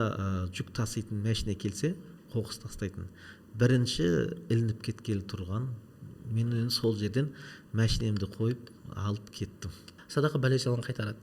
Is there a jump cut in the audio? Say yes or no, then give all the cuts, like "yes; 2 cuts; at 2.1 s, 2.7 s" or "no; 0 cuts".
yes; 1 cut; at 9.9 s